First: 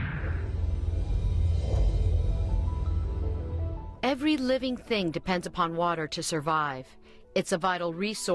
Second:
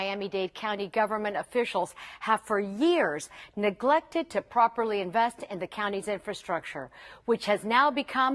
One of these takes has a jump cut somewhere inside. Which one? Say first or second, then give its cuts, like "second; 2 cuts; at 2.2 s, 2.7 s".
first; 1 cut; at 4.8 s